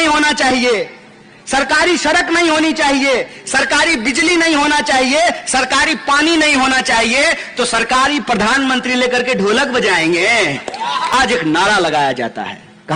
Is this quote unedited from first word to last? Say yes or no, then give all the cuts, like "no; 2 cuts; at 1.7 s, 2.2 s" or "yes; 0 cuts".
no; 1 cut; at 11.1 s